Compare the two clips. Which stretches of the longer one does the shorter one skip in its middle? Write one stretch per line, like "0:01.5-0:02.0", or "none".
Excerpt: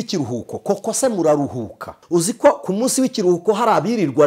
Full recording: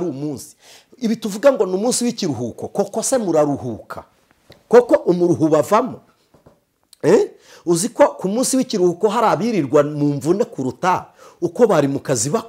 0:04.0-0:07.5